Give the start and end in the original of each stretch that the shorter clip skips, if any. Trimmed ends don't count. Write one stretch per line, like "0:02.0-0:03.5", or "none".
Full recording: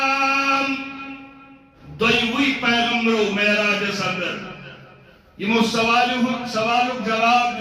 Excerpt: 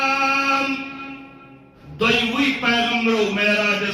none